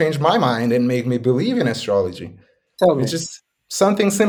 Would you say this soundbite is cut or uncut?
uncut